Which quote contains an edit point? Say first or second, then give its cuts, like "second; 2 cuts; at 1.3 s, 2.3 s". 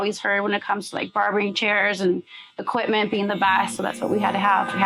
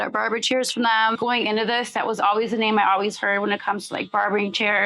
second; 1 cut; at 1.1 s